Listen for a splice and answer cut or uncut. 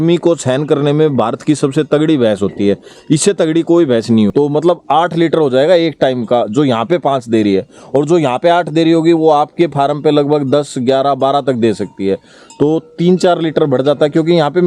cut